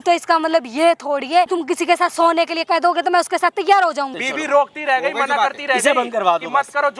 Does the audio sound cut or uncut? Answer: cut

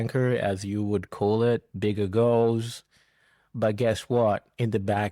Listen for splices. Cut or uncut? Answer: uncut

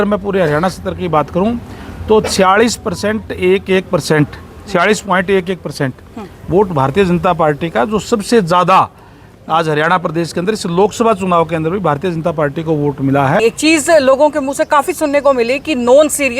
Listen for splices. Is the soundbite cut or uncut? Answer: cut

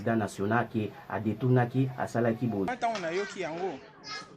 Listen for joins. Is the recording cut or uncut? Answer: cut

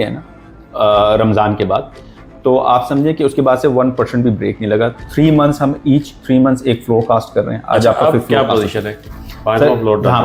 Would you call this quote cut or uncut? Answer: uncut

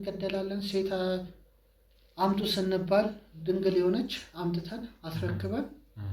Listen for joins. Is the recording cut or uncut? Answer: uncut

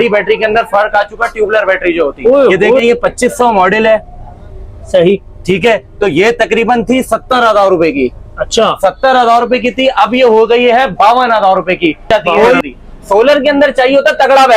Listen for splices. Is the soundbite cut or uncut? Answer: cut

